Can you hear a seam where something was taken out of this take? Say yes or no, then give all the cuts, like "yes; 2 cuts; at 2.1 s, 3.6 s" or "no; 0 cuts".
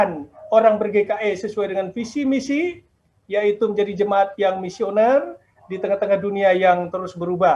no; 0 cuts